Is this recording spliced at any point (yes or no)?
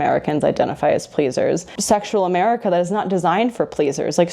yes